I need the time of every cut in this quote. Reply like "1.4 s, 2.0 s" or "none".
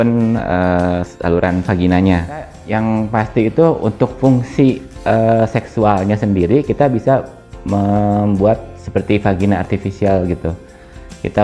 2.6 s